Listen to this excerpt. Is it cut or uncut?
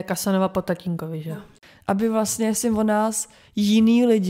cut